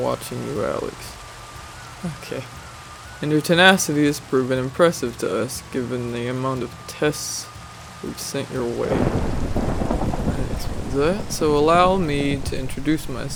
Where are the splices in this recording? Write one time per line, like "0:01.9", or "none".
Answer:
none